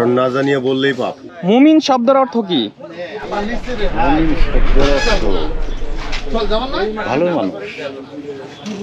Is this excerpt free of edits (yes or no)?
no